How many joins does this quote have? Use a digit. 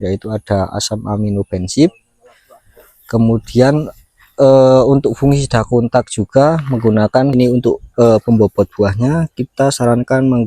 1